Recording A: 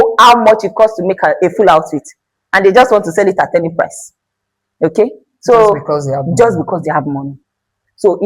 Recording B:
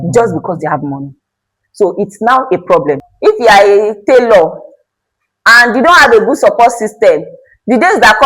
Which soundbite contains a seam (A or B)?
B